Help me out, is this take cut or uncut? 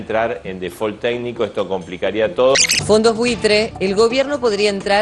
uncut